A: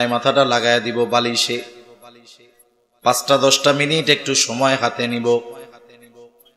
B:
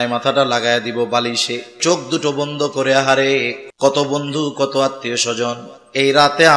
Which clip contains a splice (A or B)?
B